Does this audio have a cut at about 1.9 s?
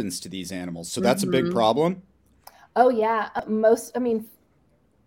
no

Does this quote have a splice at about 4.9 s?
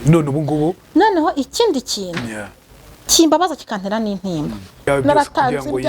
yes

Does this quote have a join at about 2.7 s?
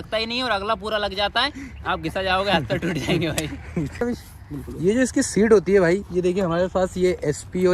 no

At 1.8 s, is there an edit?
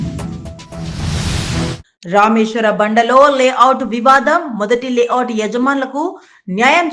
yes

